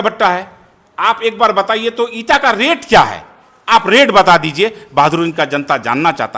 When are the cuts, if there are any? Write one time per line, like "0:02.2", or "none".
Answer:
none